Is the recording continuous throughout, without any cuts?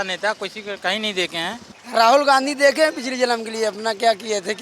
no; 1 cut; at 1.7 s

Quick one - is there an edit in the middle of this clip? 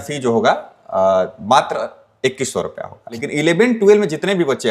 yes; 1 cut; at 3.2 s

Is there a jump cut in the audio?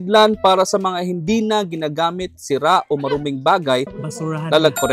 yes; 1 cut; at 4.0 s

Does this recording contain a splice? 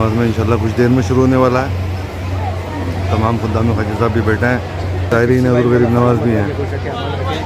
no; 0 cuts

